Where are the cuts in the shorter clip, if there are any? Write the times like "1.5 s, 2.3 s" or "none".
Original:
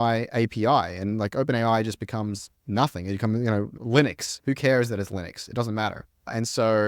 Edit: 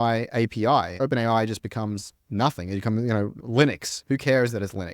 0.9 s